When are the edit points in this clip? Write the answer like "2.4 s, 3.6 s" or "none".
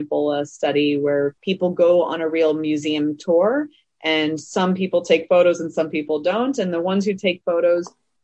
1.4 s